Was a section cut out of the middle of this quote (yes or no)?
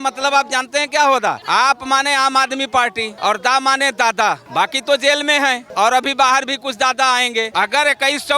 yes